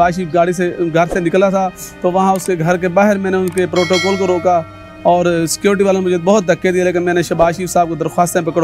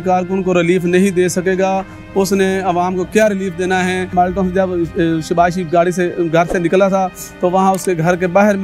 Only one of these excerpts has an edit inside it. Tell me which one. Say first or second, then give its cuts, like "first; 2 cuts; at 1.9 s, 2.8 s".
second; 1 cut; at 4.1 s